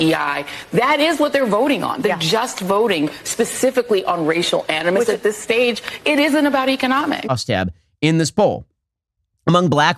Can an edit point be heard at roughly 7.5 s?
yes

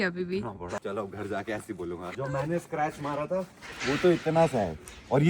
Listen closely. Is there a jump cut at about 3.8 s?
no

